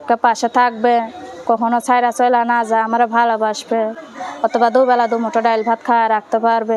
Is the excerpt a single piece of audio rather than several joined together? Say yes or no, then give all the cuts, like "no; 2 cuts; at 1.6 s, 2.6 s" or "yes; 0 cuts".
yes; 0 cuts